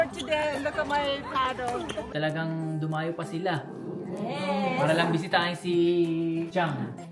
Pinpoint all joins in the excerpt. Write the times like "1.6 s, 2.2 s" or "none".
2.1 s